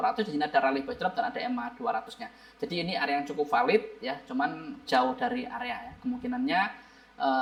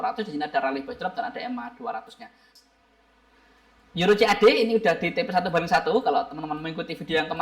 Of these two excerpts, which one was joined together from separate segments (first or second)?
second